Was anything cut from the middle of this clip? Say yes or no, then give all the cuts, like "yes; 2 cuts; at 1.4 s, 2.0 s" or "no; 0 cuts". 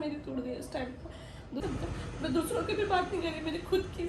yes; 1 cut; at 1.6 s